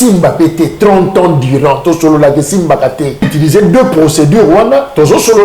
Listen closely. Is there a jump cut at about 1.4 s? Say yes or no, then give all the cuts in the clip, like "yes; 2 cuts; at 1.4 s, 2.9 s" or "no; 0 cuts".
no; 1 cut; at 3.3 s